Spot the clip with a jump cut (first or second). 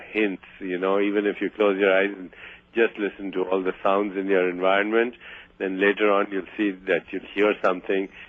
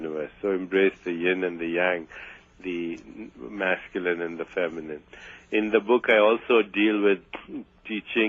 second